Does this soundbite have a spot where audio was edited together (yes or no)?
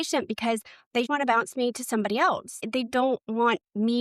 yes